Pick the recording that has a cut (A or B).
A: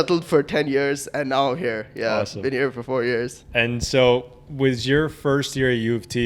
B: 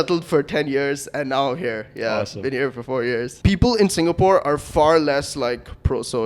B